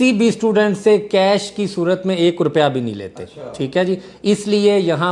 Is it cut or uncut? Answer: uncut